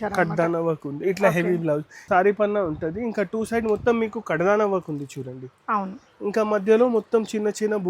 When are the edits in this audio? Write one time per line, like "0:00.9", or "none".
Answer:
0:02.0